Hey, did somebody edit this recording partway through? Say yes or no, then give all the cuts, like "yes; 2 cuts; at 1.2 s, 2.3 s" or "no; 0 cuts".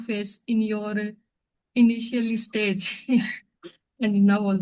no; 0 cuts